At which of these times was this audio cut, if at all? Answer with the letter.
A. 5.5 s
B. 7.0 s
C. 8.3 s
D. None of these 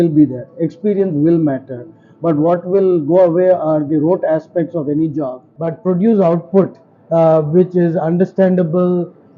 A